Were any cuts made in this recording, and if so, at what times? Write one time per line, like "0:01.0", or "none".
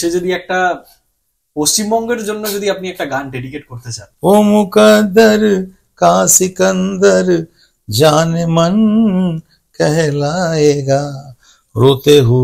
0:04.0